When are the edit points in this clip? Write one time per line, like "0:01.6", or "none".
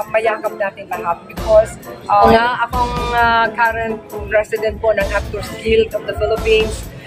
0:02.3